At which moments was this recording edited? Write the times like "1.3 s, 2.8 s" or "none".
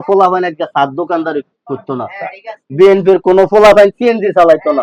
none

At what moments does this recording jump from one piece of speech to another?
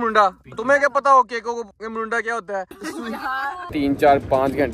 2.7 s, 3.7 s

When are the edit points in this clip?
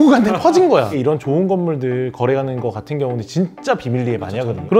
0.9 s

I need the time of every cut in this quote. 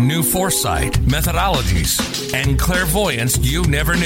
none

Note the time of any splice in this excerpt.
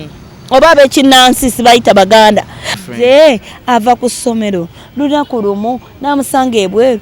2.8 s

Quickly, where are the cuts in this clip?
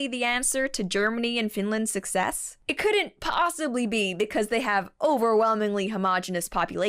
0.9 s

